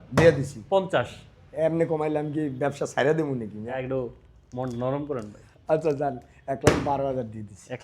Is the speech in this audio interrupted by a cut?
yes; 1 cut; at 3.8 s

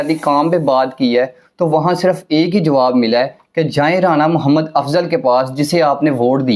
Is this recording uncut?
yes; 0 cuts

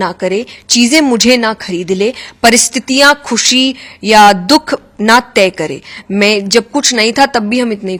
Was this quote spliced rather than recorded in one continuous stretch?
no; 0 cuts

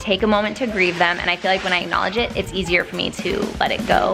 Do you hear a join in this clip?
no; 0 cuts

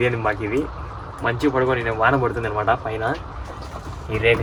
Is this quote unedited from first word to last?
yes; 0 cuts

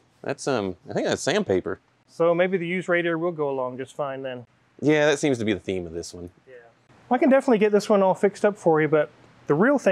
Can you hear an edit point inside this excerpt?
no; 0 cuts

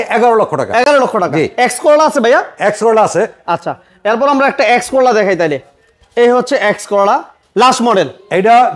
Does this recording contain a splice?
no; 0 cuts

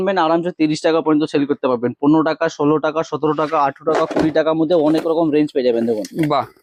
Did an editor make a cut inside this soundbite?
no; 0 cuts

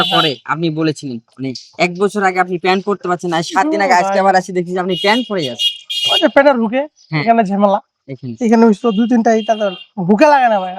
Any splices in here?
no; 0 cuts

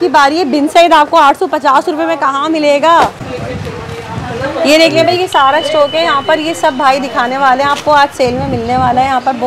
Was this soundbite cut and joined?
yes; 1 cut; at 3.3 s

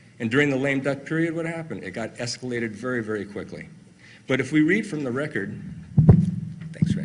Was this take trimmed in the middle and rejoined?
no; 0 cuts

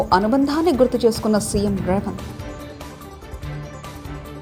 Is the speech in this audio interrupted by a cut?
no; 0 cuts

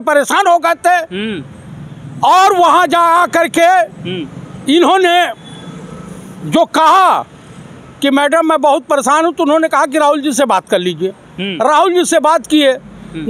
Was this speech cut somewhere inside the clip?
no; 0 cuts

